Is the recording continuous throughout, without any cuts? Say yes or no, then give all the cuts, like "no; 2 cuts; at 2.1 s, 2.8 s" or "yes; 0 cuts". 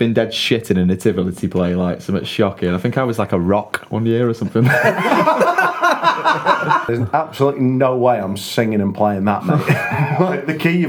no; 1 cut; at 6.9 s